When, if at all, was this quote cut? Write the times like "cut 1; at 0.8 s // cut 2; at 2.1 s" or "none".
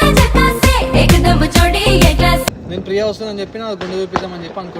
cut 1; at 2.6 s

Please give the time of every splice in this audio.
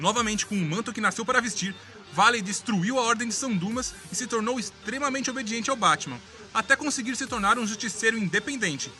none

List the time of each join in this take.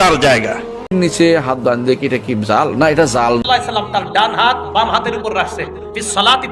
cut 1; at 0.9 s // cut 2; at 3.4 s

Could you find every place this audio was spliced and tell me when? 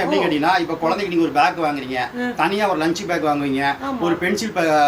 none

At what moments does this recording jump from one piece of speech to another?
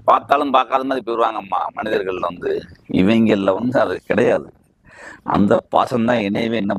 none

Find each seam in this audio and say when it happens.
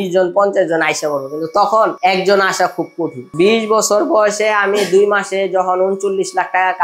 none

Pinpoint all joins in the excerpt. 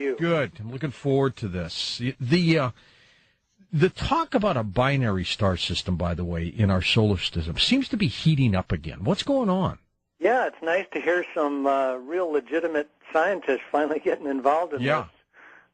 cut 1; at 3.6 s

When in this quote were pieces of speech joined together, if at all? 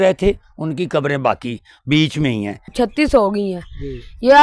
cut 1; at 2.7 s

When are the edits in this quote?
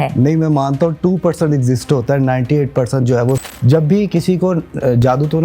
cut 1; at 3.4 s

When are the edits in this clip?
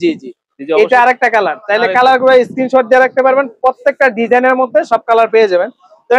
none

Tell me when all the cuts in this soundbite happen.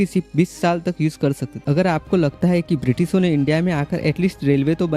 cut 1; at 1.6 s

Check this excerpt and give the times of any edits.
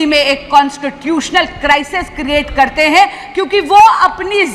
none

